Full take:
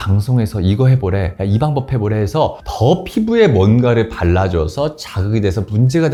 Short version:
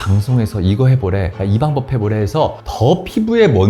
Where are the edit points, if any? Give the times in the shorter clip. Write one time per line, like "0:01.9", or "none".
none